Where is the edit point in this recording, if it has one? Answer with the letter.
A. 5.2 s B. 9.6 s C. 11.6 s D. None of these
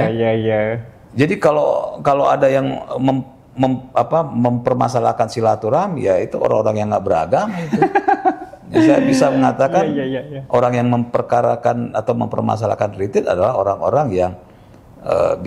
D